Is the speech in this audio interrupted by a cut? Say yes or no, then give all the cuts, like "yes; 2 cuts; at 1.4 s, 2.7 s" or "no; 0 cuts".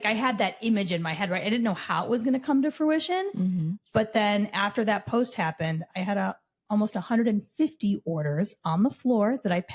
no; 0 cuts